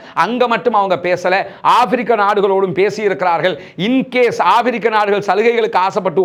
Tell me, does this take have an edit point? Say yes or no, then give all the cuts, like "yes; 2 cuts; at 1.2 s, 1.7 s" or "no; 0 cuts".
no; 0 cuts